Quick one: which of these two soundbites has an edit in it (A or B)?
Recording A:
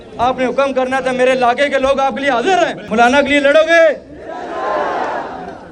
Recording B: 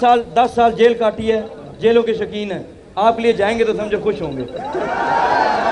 A